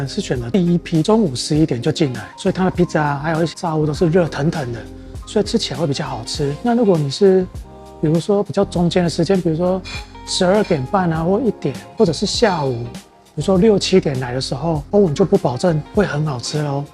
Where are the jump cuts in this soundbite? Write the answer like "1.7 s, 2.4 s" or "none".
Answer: 1.0 s, 3.5 s

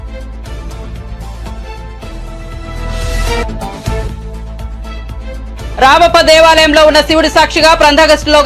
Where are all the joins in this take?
1.3 s

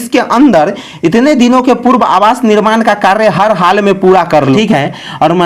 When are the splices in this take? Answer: 4.6 s

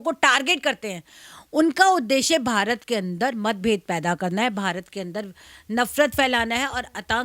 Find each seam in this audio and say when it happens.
none

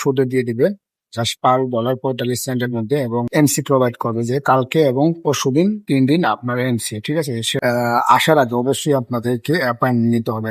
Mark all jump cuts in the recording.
3.3 s, 7.5 s

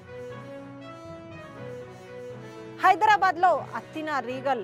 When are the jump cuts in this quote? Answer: none

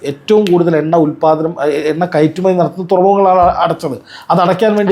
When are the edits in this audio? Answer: none

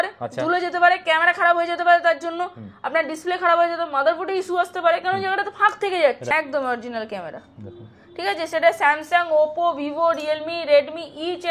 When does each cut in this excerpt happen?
6.2 s

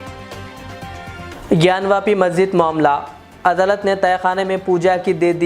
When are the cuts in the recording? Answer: 1.3 s

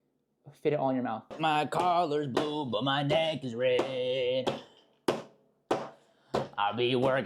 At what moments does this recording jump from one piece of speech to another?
1.3 s

